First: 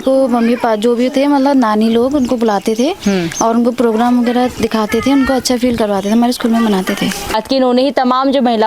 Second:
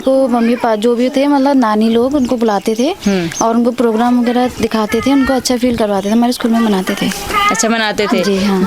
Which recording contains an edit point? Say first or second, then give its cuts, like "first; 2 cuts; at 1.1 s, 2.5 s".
first; 1 cut; at 7.3 s